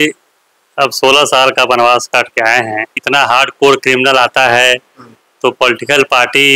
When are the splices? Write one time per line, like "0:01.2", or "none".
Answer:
0:03.0